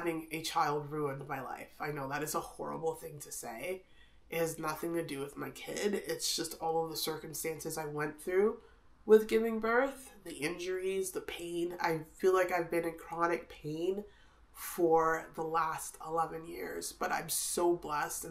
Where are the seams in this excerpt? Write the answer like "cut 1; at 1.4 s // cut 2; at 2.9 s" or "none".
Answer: none